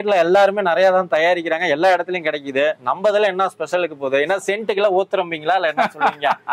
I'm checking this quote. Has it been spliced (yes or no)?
no